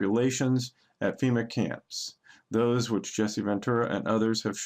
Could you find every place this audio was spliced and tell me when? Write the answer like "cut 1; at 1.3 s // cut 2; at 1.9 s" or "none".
cut 1; at 2.5 s